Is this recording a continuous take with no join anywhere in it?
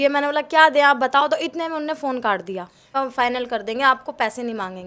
no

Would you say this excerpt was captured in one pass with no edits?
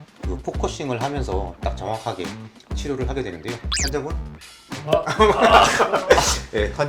yes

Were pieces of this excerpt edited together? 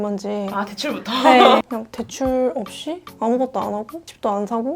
yes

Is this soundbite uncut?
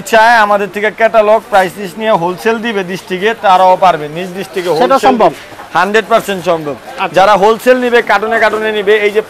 yes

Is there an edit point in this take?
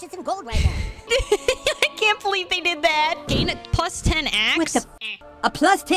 yes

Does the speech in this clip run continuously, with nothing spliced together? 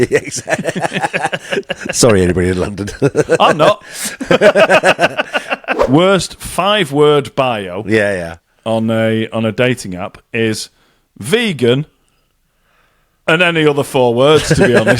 no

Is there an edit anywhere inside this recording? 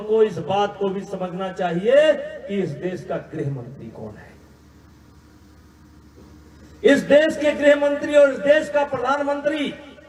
no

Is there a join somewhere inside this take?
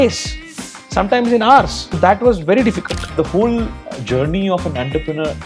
yes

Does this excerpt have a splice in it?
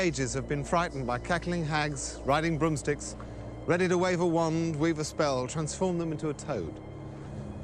yes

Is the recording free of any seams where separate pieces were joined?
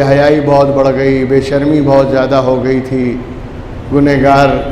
yes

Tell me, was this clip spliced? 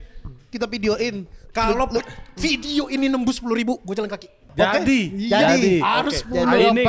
yes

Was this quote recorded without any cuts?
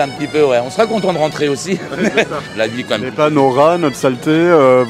no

